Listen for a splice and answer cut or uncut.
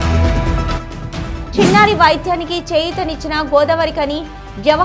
uncut